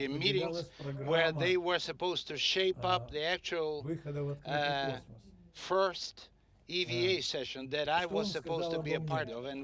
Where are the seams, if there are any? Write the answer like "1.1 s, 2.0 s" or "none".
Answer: 4.1 s